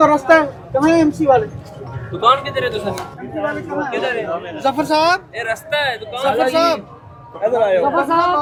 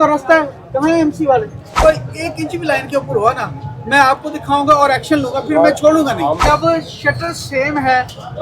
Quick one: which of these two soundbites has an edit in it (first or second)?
second